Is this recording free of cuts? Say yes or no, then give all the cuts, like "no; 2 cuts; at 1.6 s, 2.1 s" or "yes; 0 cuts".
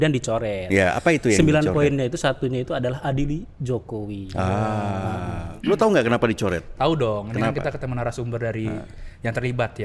yes; 0 cuts